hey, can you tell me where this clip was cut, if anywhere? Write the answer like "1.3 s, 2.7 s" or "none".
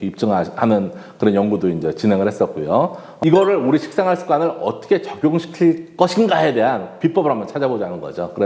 3.0 s